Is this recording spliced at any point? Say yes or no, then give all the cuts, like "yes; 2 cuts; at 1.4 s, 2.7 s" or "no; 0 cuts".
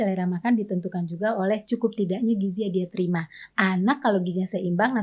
no; 0 cuts